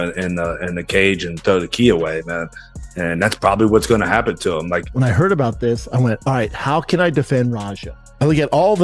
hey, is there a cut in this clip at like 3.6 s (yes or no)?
no